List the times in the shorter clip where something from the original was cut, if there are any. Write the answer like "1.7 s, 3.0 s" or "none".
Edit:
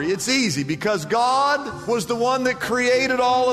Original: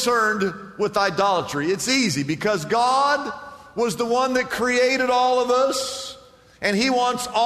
1.7 s

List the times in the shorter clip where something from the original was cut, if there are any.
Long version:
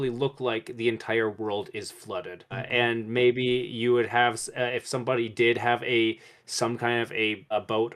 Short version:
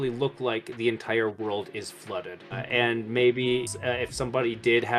3.7 s

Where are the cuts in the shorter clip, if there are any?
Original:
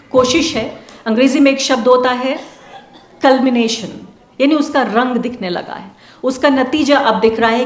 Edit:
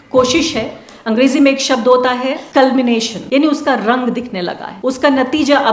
2.4 s, 3.1 s, 4.6 s

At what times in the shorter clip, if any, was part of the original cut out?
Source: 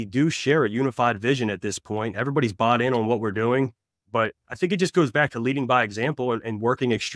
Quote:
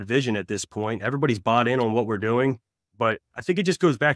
none

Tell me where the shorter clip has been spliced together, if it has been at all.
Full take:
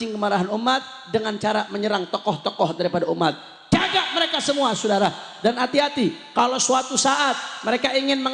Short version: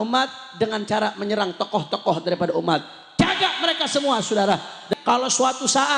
4.9 s

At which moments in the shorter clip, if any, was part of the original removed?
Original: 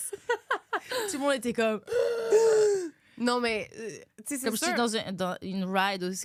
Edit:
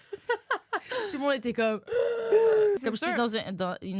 2.8 s

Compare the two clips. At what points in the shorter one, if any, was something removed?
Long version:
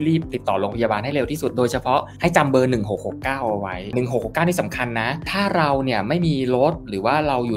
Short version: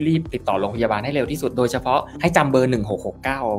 none

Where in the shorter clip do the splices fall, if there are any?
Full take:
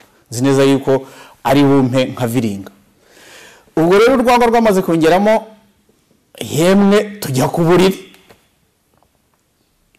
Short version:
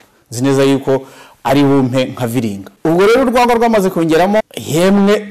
2.6 s, 4.4 s

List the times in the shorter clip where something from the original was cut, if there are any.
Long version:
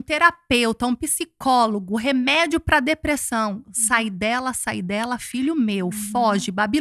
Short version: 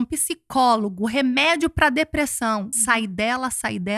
2.7 s

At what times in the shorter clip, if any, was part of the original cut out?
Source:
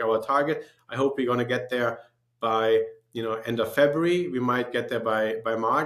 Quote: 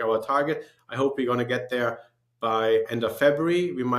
2.9 s

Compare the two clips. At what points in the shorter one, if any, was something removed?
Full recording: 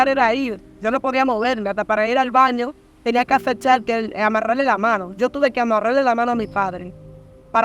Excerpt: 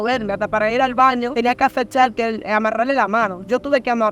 1.3 s

